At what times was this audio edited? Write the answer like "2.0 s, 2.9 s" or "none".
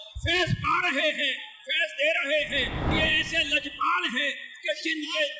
2.9 s